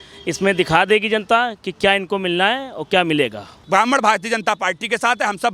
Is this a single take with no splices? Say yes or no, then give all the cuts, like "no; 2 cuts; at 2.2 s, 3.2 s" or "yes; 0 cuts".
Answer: no; 1 cut; at 3.6 s